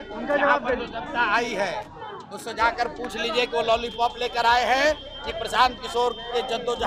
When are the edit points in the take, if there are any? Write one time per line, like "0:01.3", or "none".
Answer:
none

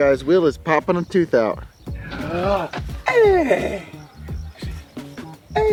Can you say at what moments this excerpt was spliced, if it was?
none

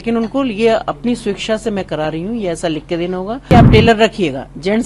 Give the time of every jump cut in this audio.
0:03.5

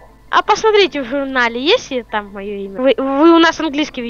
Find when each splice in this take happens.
0:02.7

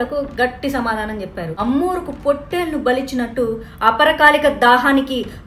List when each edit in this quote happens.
0:01.5

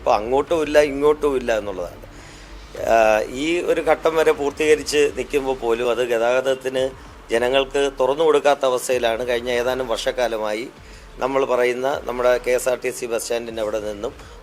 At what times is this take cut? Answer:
none

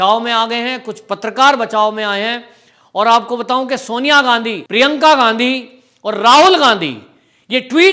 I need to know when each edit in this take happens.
none

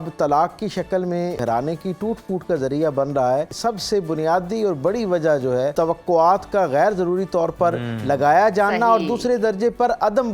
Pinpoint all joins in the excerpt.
0:01.4
0:03.5
0:05.7

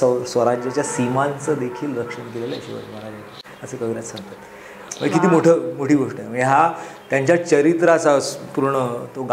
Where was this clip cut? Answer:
none

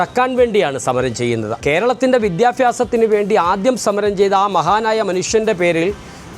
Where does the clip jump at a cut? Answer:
0:01.5

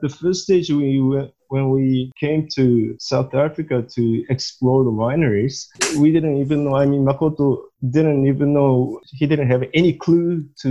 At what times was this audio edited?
0:02.1
0:03.0
0:09.0

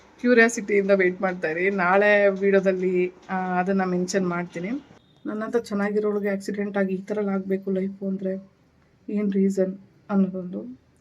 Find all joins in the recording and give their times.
0:05.3

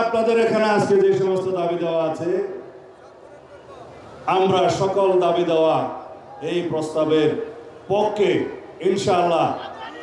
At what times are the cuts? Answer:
none

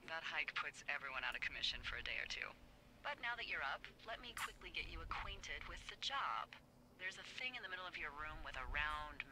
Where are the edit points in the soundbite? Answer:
0:05.0

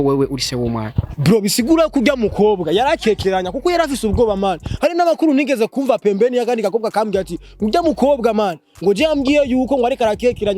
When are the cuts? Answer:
none

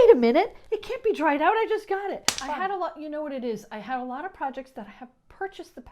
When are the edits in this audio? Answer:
0:02.3

